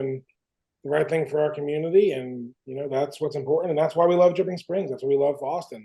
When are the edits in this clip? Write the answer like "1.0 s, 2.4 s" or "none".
none